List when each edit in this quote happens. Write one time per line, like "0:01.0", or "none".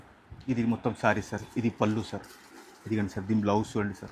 none